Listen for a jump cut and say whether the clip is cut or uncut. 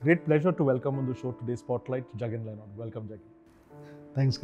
uncut